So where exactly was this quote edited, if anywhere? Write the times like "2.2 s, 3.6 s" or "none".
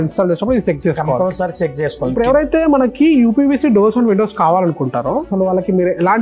2.1 s, 5.3 s